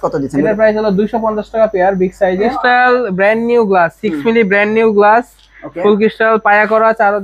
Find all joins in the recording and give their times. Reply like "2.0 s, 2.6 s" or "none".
2.6 s